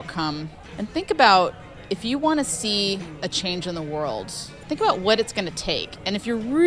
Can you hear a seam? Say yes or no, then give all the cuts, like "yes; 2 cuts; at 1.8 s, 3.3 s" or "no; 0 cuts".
yes; 1 cut; at 4.6 s